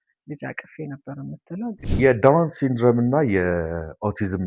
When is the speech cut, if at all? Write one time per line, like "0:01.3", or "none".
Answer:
0:01.8

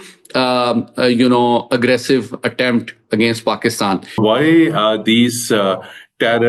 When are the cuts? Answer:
0:04.2

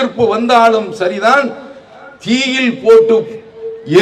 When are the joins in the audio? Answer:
none

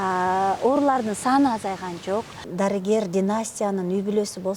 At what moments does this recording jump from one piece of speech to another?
0:02.4

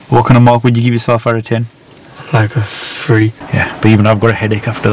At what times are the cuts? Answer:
0:03.4

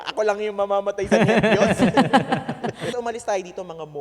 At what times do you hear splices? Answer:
0:02.9

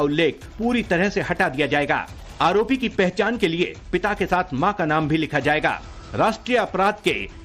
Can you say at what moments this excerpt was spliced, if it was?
none

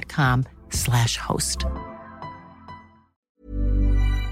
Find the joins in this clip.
0:03.2

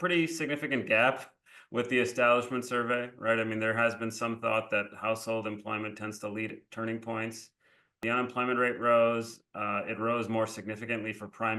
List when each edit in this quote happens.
0:08.0

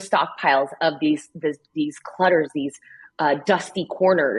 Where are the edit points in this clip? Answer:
none

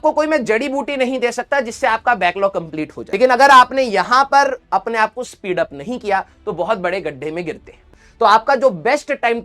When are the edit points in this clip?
0:03.0
0:07.8

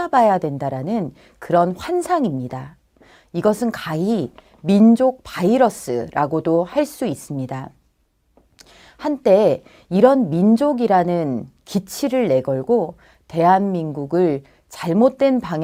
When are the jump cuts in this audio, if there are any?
none

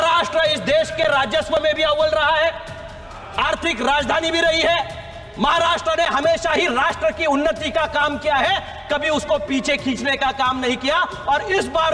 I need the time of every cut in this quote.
none

